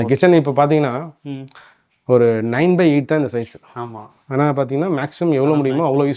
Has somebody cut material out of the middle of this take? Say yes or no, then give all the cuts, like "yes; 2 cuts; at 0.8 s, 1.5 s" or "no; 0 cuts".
no; 0 cuts